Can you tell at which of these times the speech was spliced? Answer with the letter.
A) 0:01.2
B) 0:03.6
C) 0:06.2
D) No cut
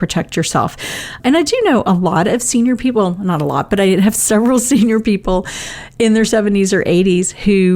A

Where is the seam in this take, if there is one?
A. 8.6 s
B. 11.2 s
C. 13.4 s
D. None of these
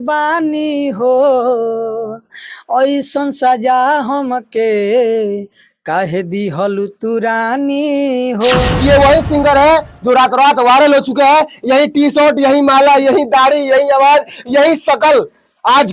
A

